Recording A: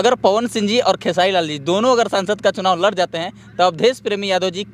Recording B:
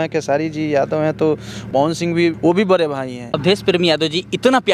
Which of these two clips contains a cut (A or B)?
B